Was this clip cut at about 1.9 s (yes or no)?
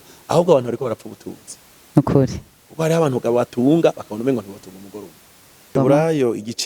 no